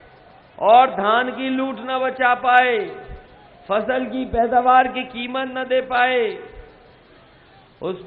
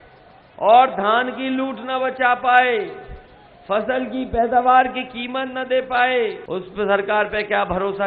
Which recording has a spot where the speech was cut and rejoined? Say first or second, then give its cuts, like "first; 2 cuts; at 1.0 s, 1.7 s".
second; 1 cut; at 6.4 s